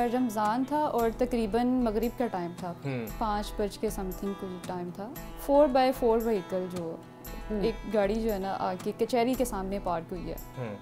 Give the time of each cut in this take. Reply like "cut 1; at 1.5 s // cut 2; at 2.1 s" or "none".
none